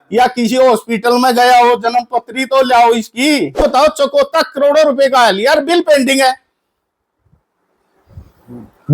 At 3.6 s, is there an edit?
yes; 1 cut; at 3.6 s

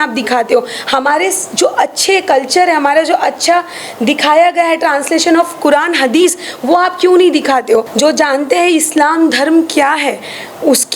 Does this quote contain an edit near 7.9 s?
yes; 1 cut; at 7.9 s

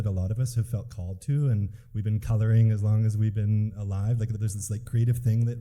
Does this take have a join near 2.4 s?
no; 1 cut; at 4.4 s

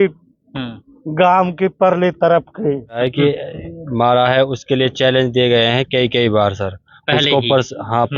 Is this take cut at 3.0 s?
yes; 1 cut; at 3.0 s

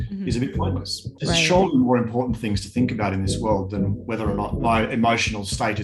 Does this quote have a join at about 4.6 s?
yes; 2 cuts; at 1.1 s, 4.6 s

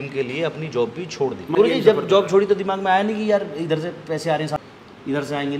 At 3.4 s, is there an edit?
no; 2 cuts; at 1.6 s, 4.6 s

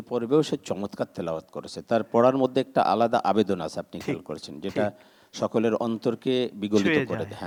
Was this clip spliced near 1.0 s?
no; 0 cuts

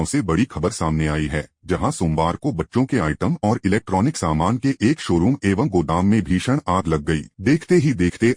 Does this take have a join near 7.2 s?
no; 0 cuts

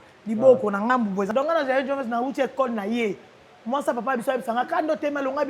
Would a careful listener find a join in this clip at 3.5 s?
no; 1 cut; at 1.3 s

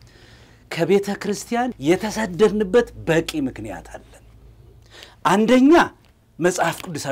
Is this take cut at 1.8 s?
yes; 1 cut; at 1.8 s

